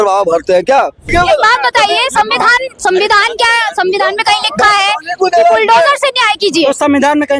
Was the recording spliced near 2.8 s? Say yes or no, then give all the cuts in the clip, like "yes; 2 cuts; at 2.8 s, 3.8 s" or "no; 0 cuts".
no; 1 cut; at 1.1 s